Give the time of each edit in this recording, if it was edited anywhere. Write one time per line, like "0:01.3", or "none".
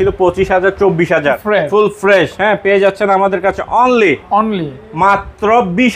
0:01.4